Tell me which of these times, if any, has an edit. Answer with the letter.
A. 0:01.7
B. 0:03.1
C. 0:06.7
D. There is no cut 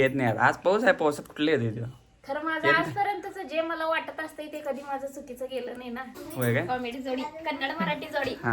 C